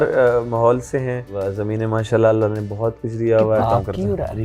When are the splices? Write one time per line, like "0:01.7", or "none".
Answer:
0:01.3
0:03.6